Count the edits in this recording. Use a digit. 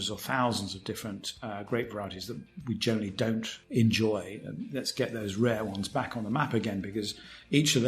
1